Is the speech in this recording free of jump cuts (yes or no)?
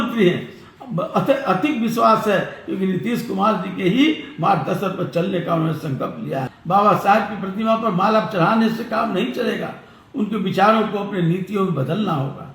no